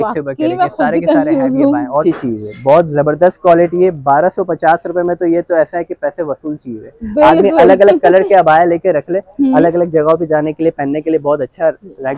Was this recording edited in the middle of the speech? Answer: yes; 1 cut; at 2.0 s

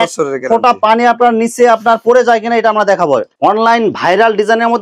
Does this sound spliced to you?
yes; 1 cut; at 3.3 s

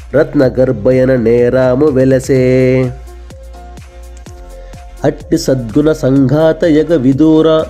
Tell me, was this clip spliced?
yes; 2 cuts; at 3.0 s, 5.0 s

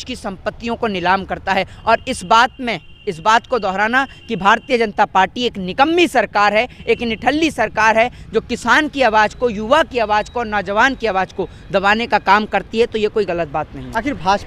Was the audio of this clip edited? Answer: no; 0 cuts

